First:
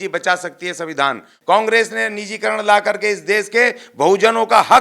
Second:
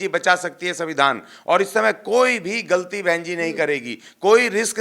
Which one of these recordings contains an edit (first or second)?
first